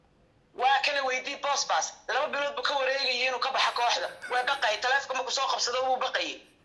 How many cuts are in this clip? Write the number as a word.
zero